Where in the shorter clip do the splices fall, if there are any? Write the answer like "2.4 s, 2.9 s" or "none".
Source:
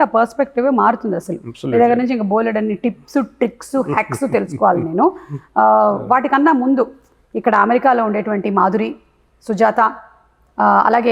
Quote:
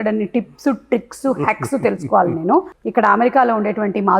2.8 s